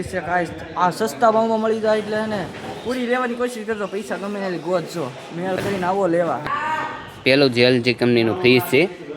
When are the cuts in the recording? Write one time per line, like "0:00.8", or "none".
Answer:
0:06.4